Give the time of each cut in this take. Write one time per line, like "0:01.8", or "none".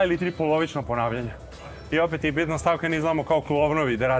none